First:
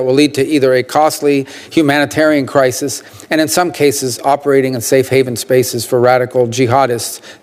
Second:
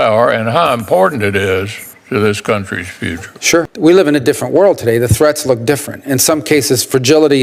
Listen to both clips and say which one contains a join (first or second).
second